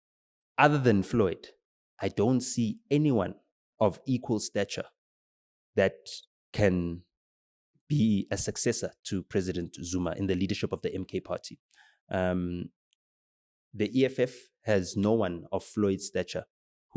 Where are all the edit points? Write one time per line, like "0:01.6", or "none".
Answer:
none